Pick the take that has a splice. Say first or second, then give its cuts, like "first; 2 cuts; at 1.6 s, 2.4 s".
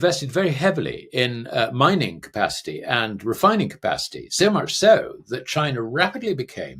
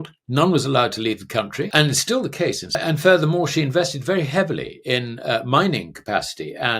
second; 2 cuts; at 1.7 s, 2.7 s